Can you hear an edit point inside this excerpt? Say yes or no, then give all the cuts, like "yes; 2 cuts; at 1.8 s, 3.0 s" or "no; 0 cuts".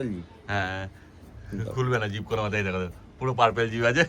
no; 0 cuts